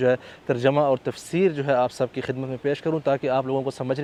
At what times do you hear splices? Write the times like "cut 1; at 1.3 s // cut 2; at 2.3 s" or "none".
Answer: none